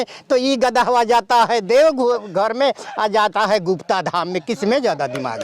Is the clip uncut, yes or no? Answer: yes